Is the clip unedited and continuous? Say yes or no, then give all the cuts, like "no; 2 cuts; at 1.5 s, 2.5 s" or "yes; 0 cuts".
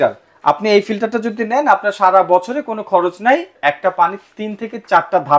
no; 1 cut; at 3.5 s